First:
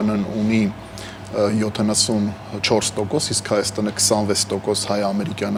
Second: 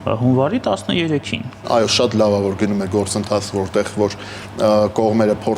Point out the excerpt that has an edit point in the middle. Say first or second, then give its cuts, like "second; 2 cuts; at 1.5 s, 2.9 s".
second; 1 cut; at 1.6 s